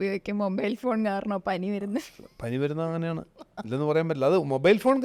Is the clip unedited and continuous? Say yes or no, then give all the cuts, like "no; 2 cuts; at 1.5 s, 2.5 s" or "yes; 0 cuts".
yes; 0 cuts